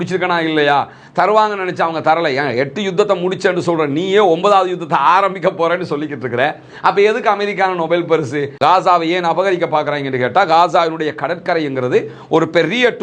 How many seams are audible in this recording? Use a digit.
1